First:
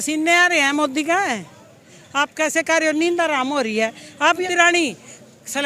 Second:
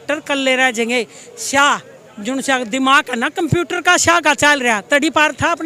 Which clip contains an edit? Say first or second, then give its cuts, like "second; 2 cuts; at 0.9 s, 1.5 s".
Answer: first; 1 cut; at 4.4 s